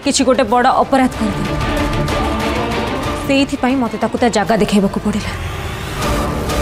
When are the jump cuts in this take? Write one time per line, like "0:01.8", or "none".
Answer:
0:03.1